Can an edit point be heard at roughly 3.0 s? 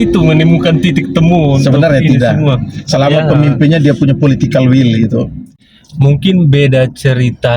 no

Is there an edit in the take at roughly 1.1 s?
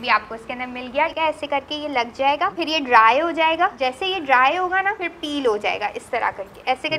yes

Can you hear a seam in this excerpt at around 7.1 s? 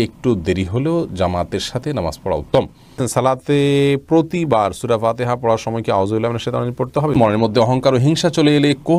yes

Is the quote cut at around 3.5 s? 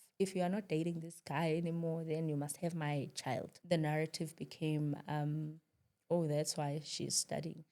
yes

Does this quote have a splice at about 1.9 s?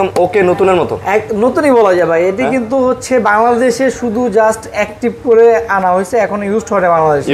no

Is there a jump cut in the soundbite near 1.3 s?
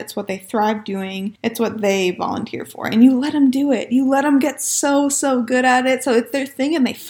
yes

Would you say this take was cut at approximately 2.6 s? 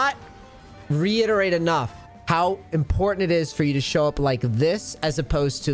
no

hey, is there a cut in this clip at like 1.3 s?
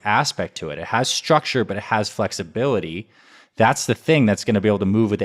no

